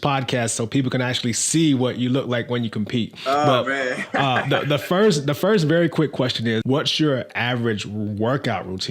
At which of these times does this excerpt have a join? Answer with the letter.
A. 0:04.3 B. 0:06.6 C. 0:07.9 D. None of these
B